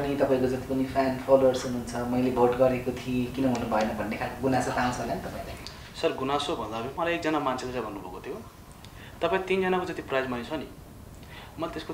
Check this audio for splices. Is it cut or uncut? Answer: uncut